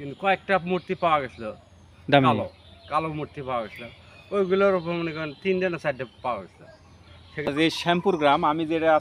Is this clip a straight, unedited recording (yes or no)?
no